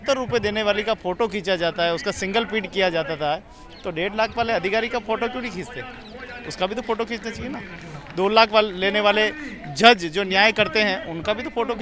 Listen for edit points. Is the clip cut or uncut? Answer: uncut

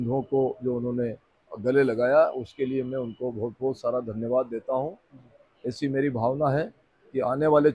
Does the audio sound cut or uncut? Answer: uncut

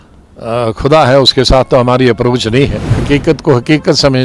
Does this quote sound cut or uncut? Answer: cut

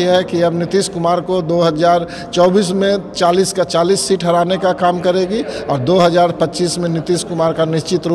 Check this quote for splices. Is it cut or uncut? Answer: uncut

